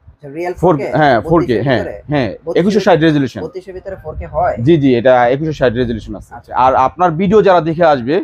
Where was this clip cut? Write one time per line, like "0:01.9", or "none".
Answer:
0:06.5